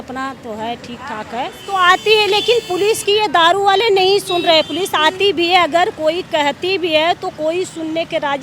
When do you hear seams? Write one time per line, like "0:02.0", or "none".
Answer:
0:01.6